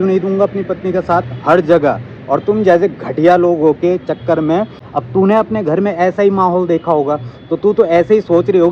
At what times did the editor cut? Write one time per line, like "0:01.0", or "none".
0:04.8